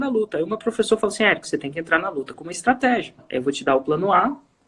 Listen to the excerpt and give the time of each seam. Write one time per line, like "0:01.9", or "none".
0:03.2

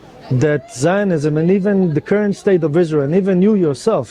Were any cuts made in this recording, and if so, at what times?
none

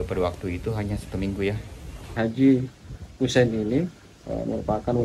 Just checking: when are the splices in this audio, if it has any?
0:02.1

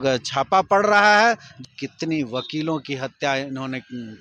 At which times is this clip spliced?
0:01.5

